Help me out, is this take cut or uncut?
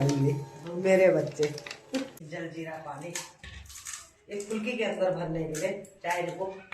cut